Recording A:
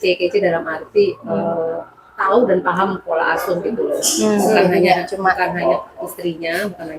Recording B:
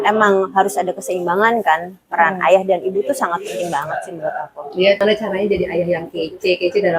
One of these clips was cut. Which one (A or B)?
B